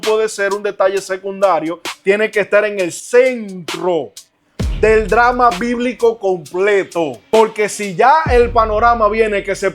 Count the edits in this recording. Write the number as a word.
one